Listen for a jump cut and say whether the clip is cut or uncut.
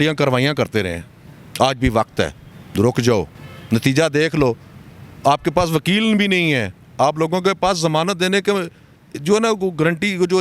uncut